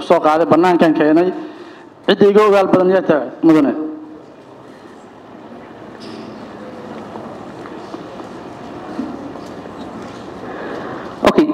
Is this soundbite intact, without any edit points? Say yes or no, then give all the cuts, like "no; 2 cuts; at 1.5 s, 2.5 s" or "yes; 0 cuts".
yes; 0 cuts